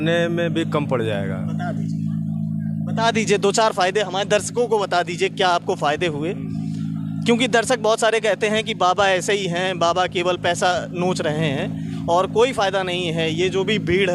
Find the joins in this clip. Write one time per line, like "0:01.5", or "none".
none